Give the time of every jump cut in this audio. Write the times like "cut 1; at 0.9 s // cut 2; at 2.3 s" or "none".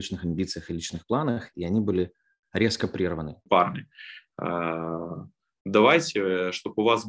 cut 1; at 3.4 s